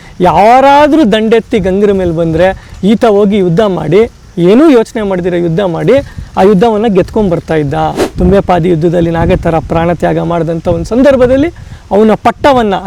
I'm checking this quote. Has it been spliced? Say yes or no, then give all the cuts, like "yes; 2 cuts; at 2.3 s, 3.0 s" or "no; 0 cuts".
yes; 1 cut; at 8.0 s